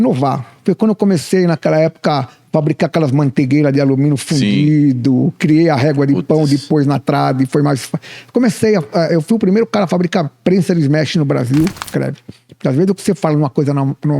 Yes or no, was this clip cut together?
yes